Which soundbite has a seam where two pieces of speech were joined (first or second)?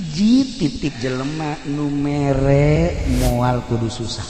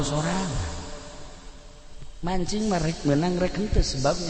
first